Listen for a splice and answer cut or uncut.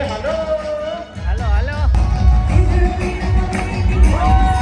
cut